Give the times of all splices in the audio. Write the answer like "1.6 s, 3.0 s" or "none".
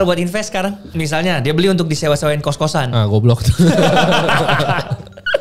1.0 s